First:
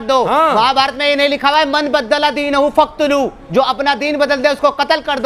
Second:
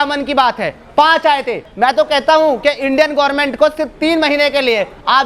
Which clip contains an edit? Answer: second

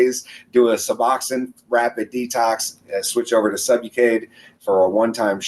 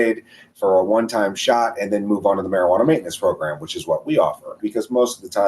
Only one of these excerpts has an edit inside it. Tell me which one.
second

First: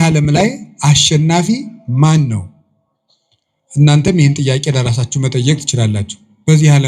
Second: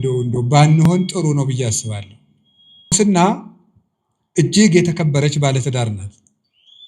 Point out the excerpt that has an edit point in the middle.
second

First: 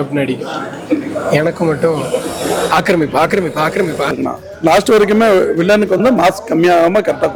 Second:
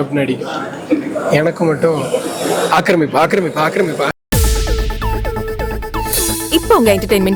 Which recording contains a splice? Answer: first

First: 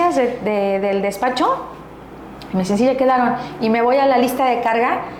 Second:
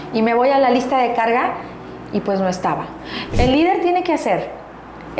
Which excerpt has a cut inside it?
second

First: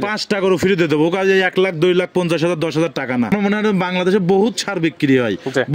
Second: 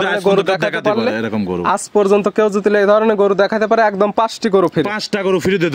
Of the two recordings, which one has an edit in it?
first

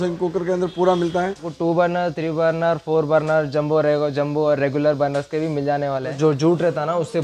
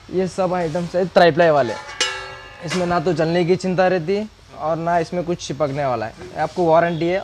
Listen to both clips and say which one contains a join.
first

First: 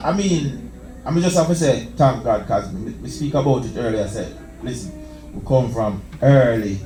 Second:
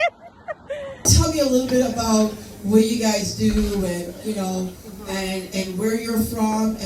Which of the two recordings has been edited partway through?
second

